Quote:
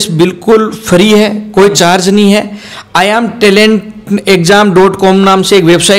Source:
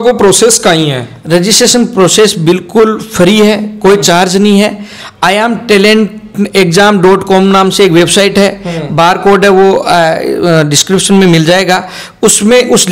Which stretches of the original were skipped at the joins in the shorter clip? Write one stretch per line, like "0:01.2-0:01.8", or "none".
none